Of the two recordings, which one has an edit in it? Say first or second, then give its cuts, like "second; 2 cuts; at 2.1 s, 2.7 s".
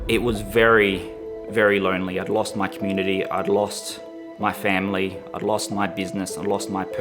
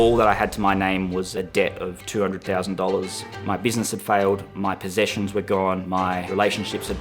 second; 4 cuts; at 1.3 s, 3.2 s, 4.5 s, 6.0 s